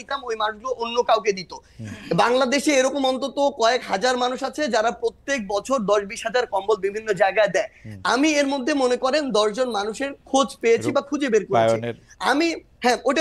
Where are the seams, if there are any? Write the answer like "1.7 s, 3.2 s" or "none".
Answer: none